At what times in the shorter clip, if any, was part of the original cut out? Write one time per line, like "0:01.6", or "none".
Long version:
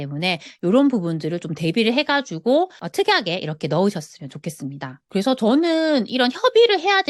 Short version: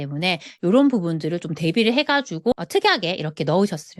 0:02.5